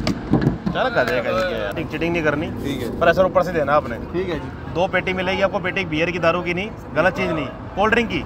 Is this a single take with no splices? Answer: yes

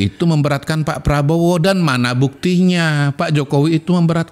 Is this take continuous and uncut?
yes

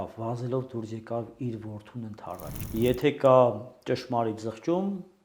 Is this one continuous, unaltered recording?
no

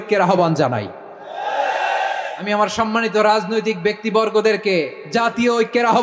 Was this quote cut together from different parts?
yes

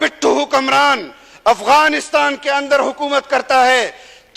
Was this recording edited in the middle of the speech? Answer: no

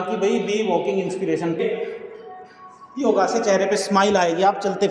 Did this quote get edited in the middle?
yes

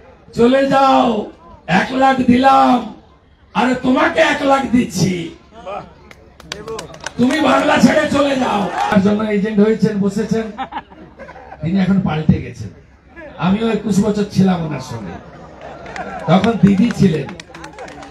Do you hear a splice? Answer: yes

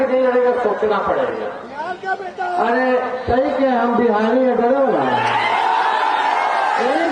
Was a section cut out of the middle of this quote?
no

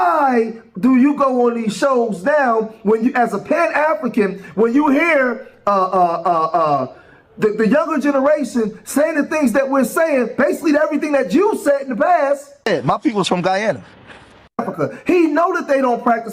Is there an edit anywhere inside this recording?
yes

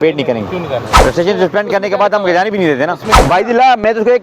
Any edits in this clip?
yes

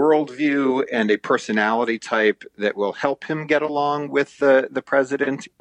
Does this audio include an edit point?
no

